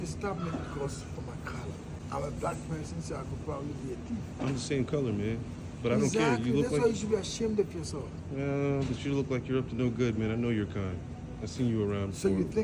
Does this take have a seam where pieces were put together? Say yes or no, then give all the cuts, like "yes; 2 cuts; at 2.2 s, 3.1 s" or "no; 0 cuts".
yes; 1 cut; at 2.0 s